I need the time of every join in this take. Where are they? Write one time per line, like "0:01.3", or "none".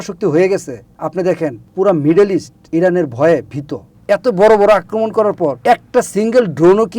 0:01.3
0:02.6
0:03.9
0:05.6